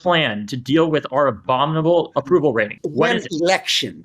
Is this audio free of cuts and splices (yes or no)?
no